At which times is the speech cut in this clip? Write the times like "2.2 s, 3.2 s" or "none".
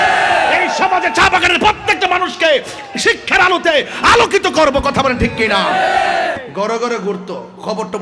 6.4 s